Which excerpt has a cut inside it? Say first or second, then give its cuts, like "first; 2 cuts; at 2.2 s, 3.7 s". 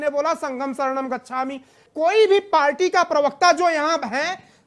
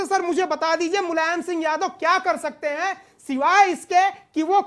first; 1 cut; at 1.9 s